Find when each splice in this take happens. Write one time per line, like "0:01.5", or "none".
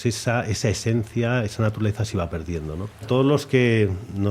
0:03.0